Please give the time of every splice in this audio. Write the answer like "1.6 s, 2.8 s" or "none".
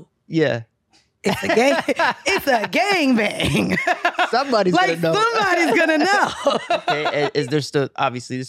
7.0 s